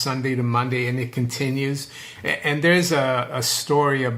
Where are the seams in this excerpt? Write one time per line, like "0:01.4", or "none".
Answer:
none